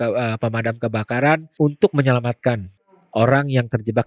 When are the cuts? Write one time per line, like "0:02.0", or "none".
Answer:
0:01.5
0:03.0